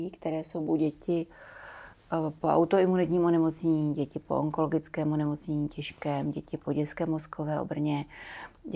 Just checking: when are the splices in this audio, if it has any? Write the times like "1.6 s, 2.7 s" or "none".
none